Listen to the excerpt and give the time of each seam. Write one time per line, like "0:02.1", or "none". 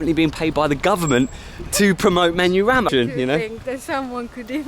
0:02.9